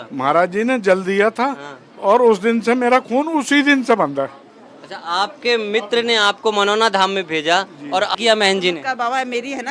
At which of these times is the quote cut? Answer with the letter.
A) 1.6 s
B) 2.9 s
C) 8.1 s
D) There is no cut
C